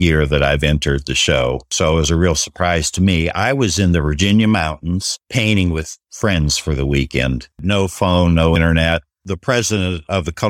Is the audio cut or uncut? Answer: cut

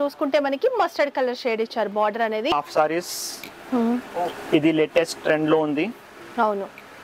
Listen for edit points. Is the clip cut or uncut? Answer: cut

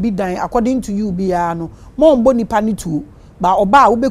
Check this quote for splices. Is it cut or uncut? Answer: uncut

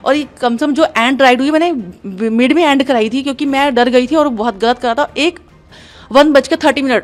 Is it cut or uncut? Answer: uncut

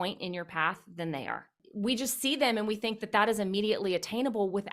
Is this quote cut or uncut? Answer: cut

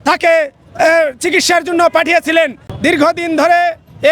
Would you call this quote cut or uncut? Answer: cut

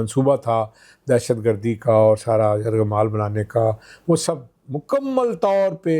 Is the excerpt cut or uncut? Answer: uncut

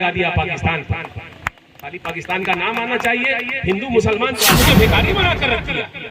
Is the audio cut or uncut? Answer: cut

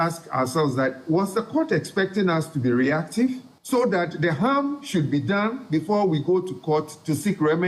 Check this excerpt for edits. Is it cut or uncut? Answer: uncut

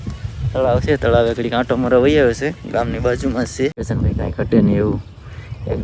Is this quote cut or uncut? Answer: cut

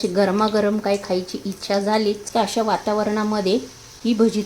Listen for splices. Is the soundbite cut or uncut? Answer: cut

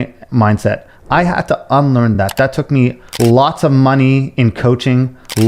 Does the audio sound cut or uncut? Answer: uncut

